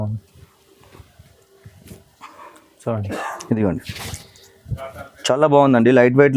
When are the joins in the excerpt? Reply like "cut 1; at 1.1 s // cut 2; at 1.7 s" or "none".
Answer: none